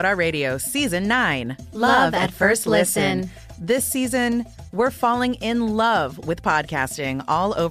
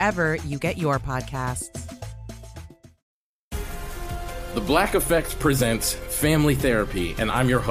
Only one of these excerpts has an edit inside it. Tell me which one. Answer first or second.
second